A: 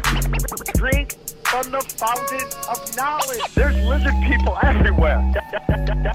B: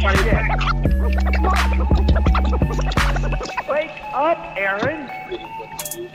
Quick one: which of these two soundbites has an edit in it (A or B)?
A